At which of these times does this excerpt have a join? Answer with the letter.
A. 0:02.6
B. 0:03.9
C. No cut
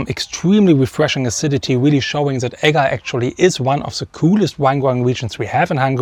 C